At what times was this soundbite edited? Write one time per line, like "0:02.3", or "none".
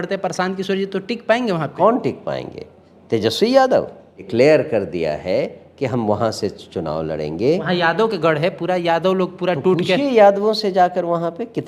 0:01.7
0:04.3
0:07.6

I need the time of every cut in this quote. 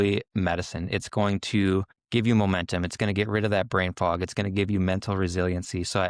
0:02.0

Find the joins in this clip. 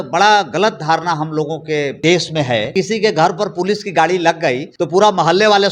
0:02.0
0:02.7
0:04.7

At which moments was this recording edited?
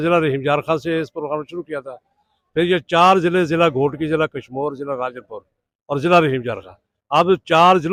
none

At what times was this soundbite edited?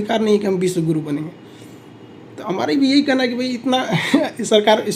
none

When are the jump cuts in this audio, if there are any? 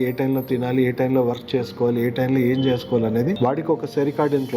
0:03.4

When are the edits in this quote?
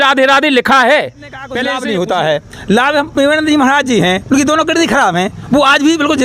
0:01.6

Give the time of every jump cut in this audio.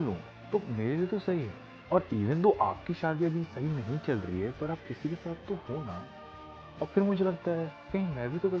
0:02.1

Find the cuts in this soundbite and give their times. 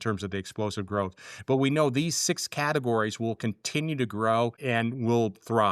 0:04.6

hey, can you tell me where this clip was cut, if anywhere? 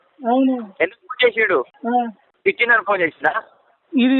0:01.7

